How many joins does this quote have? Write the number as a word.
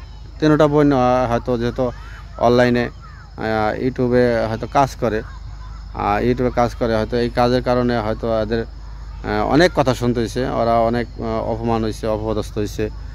zero